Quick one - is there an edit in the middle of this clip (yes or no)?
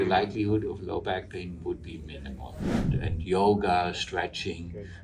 yes